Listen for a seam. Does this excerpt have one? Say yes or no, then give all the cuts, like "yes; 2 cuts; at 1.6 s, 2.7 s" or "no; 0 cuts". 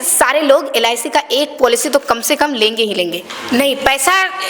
yes; 1 cut; at 3.3 s